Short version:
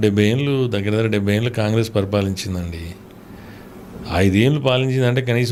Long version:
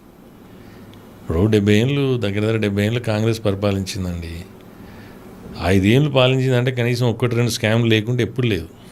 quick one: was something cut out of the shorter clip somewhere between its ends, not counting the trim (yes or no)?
no